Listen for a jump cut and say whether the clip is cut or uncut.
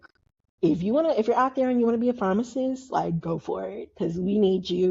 uncut